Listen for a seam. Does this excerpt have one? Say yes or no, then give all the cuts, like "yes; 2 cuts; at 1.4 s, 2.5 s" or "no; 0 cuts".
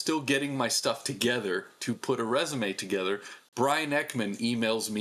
no; 0 cuts